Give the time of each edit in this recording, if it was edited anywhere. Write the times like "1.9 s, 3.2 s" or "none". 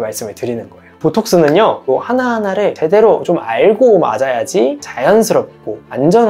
1.0 s, 1.9 s